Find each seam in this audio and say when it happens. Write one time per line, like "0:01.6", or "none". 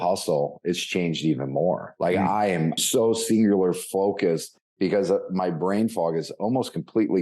0:01.9
0:02.8